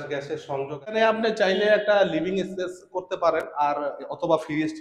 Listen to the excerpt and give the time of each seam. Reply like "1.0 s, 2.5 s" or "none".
0.9 s